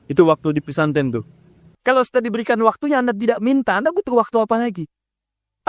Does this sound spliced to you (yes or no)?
yes